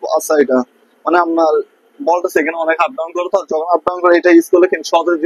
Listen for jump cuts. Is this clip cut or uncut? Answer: uncut